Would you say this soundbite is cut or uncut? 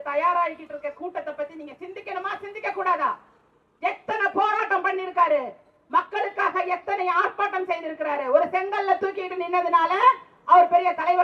uncut